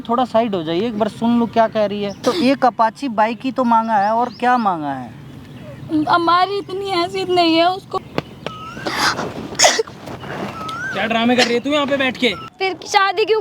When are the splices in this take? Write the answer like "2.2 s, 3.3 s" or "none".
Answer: 2.2 s, 7.9 s, 12.5 s